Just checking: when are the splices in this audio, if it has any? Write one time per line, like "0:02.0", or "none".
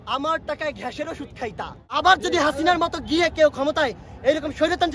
0:01.8